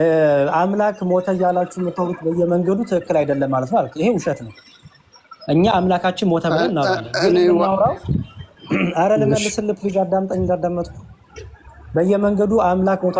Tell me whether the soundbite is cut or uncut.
uncut